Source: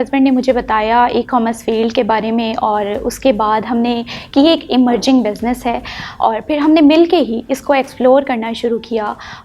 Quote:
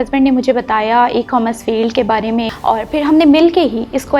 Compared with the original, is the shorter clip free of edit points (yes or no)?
no